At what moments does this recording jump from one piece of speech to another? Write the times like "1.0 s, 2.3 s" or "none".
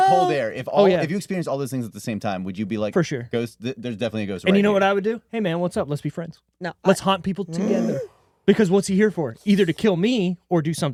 none